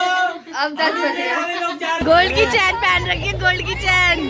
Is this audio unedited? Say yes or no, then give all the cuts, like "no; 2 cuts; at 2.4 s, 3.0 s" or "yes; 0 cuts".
no; 1 cut; at 2.0 s